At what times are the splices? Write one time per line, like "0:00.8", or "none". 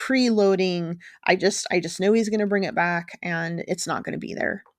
none